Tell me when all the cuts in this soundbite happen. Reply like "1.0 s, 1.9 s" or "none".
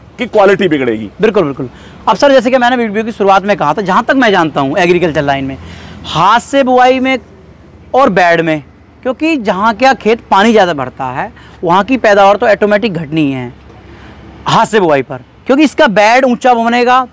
none